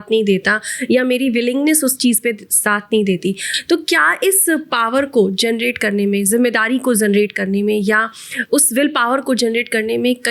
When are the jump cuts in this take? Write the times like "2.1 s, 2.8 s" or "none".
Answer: none